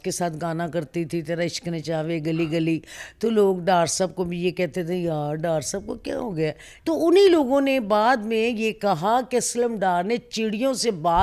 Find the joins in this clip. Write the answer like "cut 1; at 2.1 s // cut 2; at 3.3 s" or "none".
cut 1; at 6.7 s